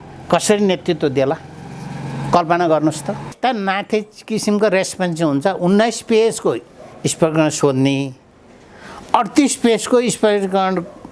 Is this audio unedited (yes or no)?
no